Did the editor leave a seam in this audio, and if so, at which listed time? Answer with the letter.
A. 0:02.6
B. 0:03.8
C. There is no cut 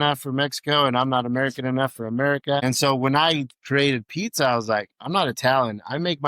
A